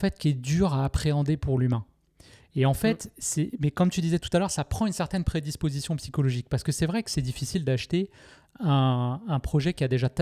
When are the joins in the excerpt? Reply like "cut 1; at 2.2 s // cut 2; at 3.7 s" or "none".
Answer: none